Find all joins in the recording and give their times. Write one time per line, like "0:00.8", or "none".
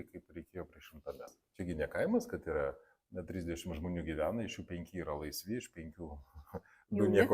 0:01.4